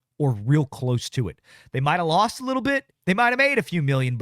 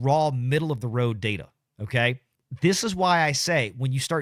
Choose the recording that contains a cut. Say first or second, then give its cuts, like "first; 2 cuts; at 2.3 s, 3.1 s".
first; 1 cut; at 2.9 s